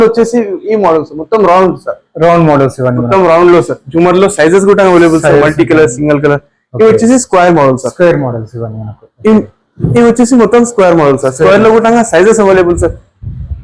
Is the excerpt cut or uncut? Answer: uncut